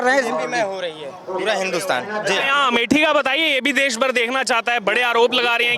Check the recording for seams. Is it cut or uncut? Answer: uncut